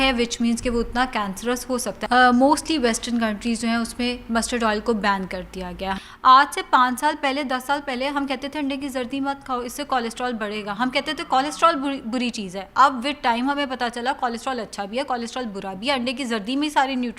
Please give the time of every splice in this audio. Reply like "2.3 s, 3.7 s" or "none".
2.0 s, 6.0 s